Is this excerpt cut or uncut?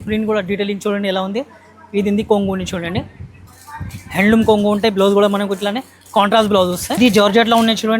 cut